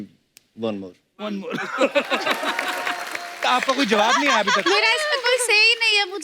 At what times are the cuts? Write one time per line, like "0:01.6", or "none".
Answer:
0:02.6